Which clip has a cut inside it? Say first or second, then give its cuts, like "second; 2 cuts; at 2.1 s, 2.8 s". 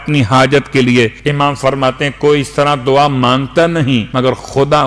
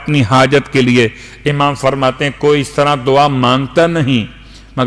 first; 2 cuts; at 1.2 s, 4.1 s